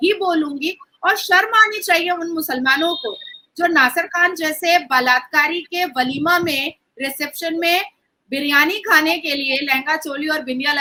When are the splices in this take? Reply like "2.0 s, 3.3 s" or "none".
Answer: none